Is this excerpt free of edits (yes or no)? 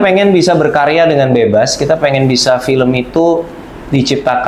yes